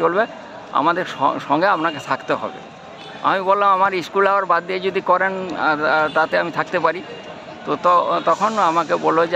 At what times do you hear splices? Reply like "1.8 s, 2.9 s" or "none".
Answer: none